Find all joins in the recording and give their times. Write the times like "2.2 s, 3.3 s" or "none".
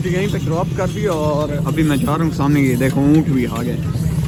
none